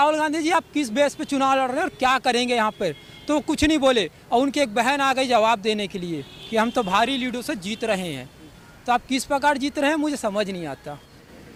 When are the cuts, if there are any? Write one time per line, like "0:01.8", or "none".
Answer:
none